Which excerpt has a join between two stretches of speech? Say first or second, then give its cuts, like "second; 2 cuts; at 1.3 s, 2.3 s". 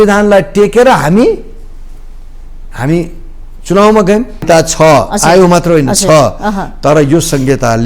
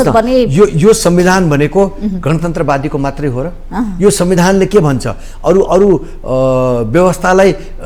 first; 1 cut; at 4.4 s